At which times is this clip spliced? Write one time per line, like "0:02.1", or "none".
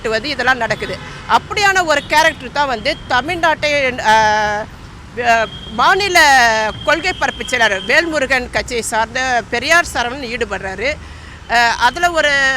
none